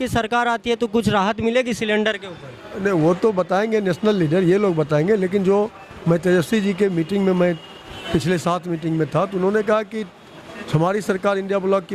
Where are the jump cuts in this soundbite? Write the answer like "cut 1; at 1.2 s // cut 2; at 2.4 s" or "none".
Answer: none

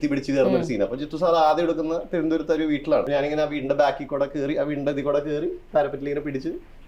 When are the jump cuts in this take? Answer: cut 1; at 3.1 s

